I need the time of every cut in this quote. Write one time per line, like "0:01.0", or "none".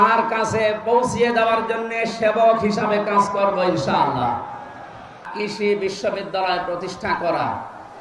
0:05.3